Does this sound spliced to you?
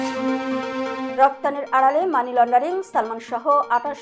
no; 0 cuts

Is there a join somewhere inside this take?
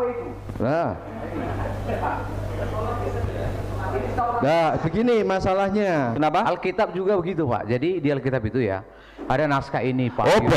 yes; 1 cut; at 6.1 s

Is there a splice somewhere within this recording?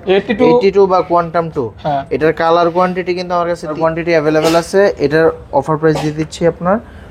yes; 1 cut; at 3.8 s

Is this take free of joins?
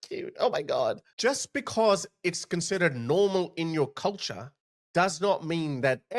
no; 1 cut; at 1.1 s

